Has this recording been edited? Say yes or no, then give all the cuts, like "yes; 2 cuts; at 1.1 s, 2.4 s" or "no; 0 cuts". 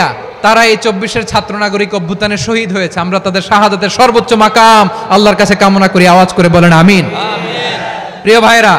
no; 0 cuts